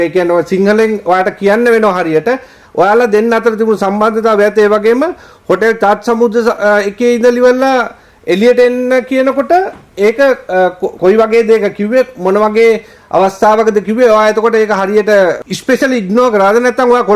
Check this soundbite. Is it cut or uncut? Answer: uncut